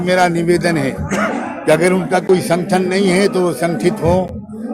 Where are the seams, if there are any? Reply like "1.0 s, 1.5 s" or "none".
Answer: none